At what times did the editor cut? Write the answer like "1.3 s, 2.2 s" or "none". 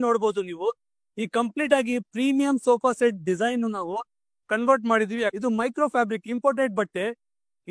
5.3 s